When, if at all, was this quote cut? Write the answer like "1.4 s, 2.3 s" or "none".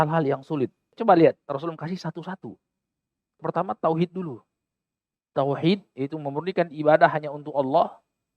1.0 s, 3.4 s